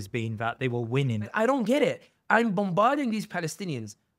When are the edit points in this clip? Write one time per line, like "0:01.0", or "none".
0:01.3